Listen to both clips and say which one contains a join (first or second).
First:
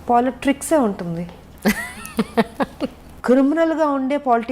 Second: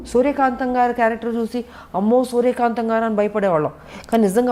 first